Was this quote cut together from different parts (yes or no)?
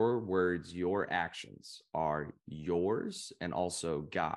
no